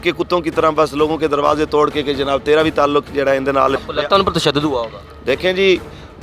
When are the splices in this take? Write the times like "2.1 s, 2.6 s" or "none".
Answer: 3.8 s